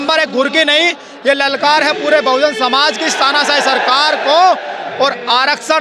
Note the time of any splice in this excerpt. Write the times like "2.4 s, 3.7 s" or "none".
none

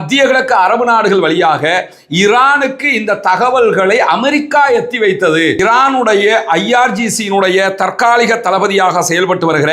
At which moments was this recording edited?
5.6 s

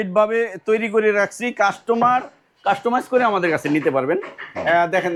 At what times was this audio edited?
none

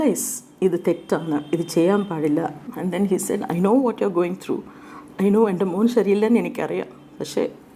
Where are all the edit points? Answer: 2.7 s

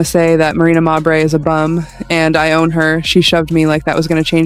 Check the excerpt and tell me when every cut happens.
none

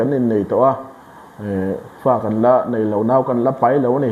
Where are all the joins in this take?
none

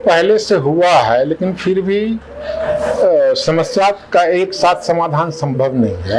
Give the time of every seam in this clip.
none

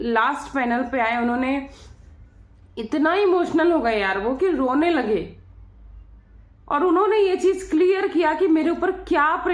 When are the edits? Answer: none

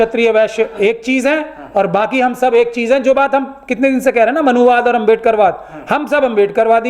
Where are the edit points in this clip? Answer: none

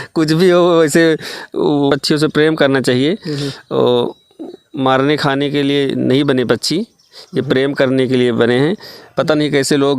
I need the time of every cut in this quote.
1.9 s

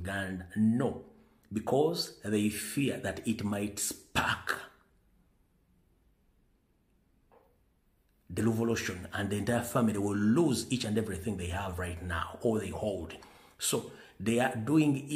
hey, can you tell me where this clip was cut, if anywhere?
none

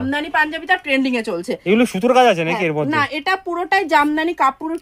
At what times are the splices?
none

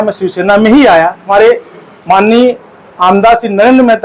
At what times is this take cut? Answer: 1.3 s

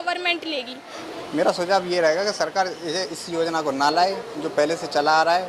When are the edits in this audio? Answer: 1.0 s

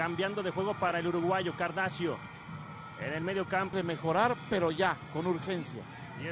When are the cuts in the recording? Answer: 1.0 s

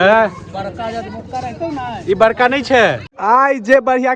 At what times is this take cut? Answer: 3.1 s

